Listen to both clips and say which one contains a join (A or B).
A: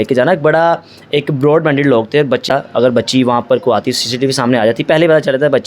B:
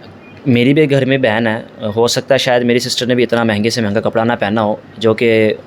A